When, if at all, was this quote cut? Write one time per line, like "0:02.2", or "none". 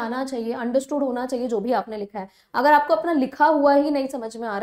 none

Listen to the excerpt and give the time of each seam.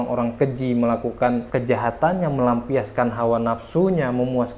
none

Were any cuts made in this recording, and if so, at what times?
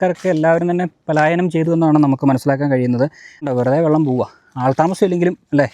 0:03.3

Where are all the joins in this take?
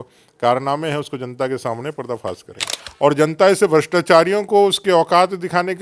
0:02.8

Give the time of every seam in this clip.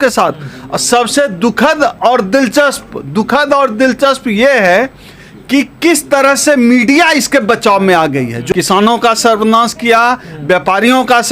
0:08.4

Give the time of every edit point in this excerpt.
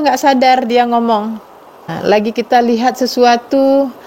0:01.9

